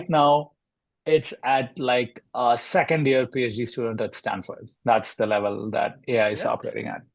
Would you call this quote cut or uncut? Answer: uncut